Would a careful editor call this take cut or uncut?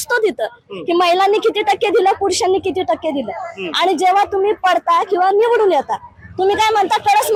uncut